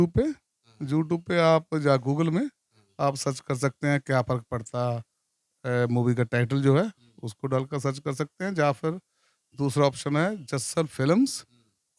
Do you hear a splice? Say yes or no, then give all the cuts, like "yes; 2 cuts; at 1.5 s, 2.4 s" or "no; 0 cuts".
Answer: no; 0 cuts